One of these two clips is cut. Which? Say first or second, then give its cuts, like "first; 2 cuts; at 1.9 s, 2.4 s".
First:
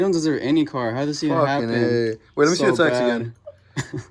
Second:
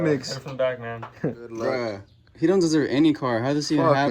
second; 1 cut; at 1.6 s